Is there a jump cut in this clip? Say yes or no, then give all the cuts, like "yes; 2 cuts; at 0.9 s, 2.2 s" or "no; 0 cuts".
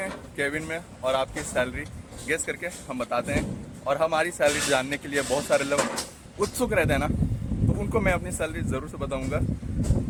no; 0 cuts